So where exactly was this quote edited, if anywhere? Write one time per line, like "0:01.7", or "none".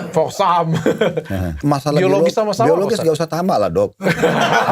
0:01.6